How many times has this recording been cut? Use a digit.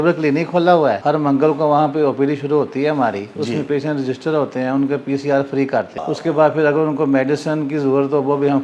2